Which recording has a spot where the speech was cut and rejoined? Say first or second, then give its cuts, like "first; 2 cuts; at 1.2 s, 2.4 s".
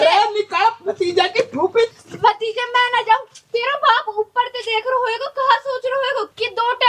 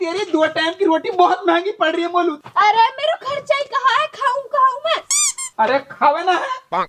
first; 1 cut; at 1.9 s